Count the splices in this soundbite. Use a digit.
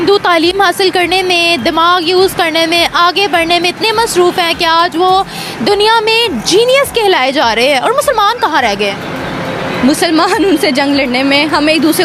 0